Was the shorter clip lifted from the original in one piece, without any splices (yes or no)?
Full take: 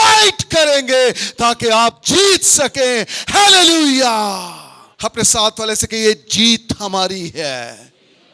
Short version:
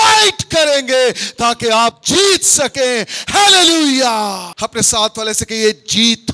no